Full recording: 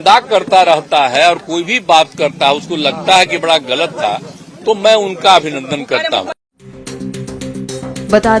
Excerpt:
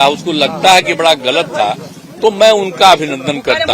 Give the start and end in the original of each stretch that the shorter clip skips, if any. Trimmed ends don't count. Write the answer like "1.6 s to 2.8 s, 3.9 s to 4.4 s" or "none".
none